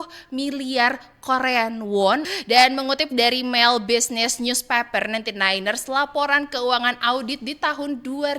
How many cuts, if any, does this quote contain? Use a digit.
1